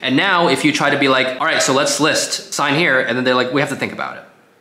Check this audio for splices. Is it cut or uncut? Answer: cut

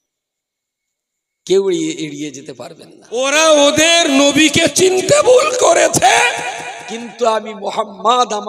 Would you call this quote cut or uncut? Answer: cut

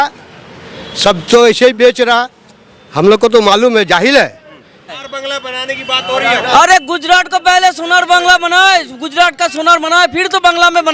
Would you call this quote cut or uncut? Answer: cut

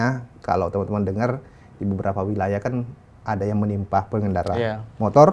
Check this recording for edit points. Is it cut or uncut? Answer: uncut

